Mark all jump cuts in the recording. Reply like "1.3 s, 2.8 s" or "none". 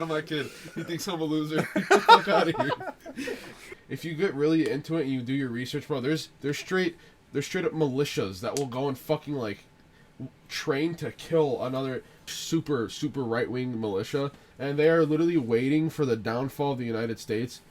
3.8 s, 12.3 s, 14.5 s

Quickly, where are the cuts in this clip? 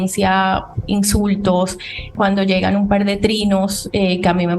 2.1 s

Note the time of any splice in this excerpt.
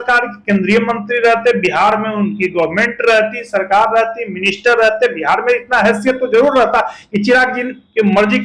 none

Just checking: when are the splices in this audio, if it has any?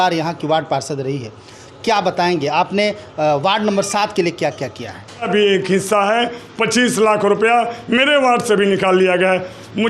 5.3 s

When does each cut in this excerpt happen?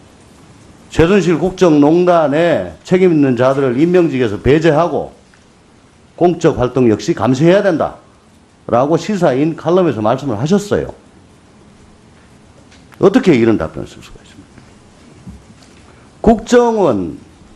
16.3 s

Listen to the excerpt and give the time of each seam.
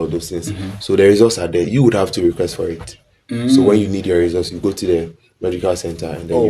none

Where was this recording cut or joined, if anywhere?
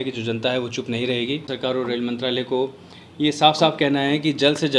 1.5 s

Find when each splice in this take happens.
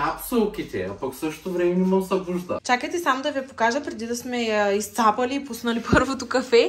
2.6 s

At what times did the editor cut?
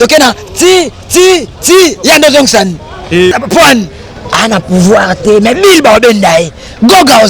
3.3 s

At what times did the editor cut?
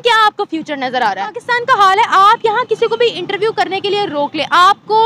1.4 s

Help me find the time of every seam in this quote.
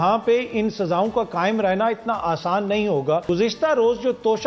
3.2 s

